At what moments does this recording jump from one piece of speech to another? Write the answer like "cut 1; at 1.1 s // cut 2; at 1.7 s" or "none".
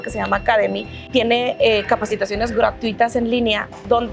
cut 1; at 0.9 s